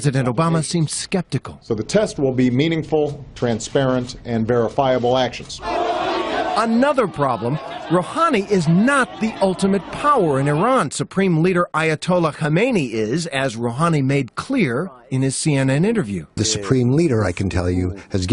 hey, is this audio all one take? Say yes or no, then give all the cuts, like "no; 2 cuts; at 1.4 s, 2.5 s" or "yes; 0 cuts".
no; 1 cut; at 11.0 s